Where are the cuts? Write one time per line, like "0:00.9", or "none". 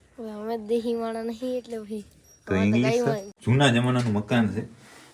0:03.3